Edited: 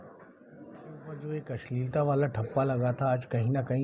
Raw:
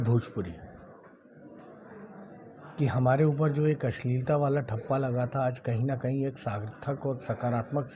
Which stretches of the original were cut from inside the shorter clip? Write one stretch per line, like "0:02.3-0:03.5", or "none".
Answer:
0:02.2-0:03.7